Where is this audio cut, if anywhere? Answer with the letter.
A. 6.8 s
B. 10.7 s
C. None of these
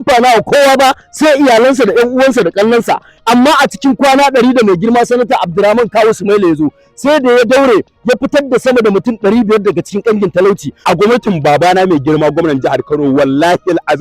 B